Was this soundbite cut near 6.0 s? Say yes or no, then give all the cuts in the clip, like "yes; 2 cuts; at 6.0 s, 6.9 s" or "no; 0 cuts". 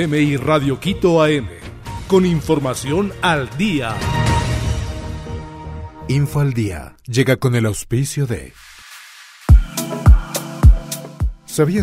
yes; 1 cut; at 6.0 s